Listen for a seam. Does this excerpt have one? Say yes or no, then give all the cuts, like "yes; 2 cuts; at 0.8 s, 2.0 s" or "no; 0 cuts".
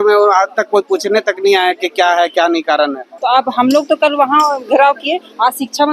yes; 1 cut; at 3.1 s